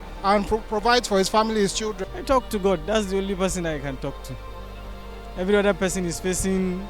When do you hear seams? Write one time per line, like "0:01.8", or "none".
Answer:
0:02.1